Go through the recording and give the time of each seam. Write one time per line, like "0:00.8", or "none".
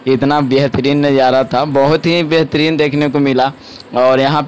none